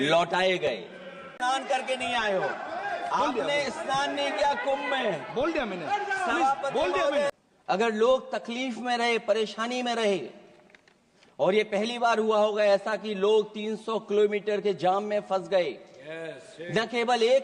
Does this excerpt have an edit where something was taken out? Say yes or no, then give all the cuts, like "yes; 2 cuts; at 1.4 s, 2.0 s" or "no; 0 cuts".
yes; 2 cuts; at 1.3 s, 7.3 s